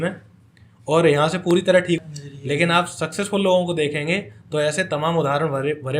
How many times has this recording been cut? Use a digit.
1